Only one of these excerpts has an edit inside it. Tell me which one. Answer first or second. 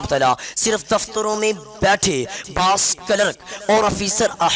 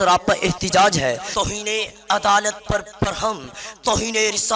second